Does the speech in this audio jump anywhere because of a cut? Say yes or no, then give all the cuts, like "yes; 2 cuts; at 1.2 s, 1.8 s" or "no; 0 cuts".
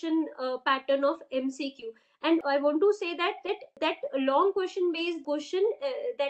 yes; 3 cuts; at 2.4 s, 3.8 s, 5.2 s